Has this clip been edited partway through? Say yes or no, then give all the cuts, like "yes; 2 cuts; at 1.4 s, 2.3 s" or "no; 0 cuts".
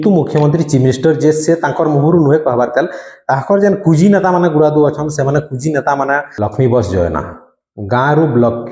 yes; 1 cut; at 6.3 s